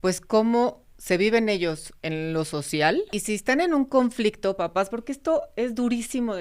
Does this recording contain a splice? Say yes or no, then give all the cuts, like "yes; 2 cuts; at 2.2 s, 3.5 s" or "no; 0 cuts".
yes; 2 cuts; at 1.9 s, 3.1 s